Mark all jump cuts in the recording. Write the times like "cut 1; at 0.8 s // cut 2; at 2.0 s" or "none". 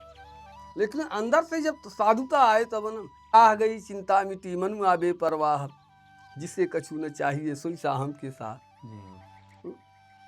cut 1; at 3.3 s